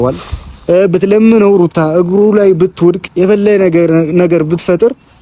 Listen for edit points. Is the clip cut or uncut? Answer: uncut